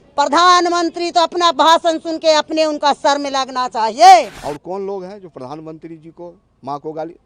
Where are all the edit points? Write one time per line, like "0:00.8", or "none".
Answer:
0:04.4

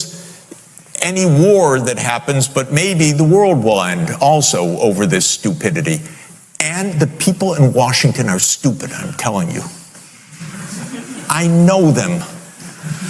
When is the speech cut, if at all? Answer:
none

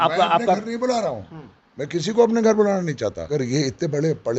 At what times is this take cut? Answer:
0:03.3

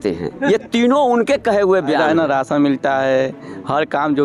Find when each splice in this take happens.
0:02.0

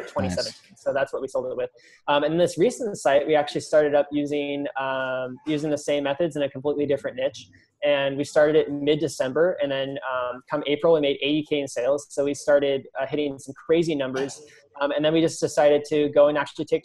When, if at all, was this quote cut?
none

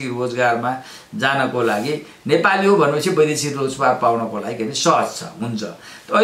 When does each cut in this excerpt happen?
none

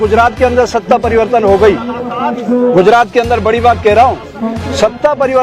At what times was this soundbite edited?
none

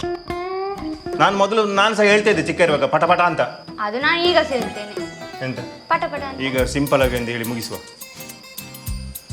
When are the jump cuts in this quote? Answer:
0:01.1
0:06.3

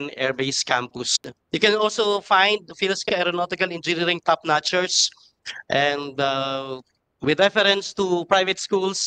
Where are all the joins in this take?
0:01.4

